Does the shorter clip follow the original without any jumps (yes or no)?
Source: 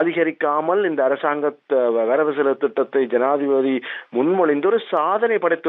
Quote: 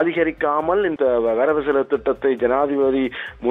no